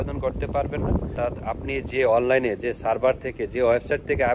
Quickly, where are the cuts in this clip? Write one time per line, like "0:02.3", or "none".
0:01.1